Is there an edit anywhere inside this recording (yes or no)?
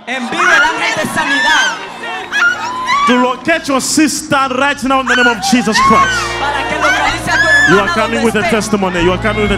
no